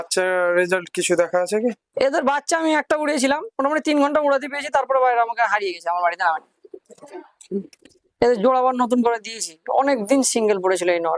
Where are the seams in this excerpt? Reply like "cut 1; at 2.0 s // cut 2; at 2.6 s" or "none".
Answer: none